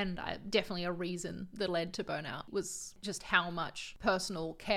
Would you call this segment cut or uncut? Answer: cut